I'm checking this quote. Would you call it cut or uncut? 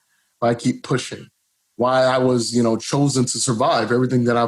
uncut